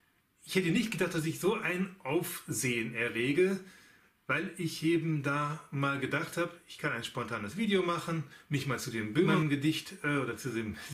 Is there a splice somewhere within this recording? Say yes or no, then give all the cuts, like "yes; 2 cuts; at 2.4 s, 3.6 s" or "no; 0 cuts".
no; 0 cuts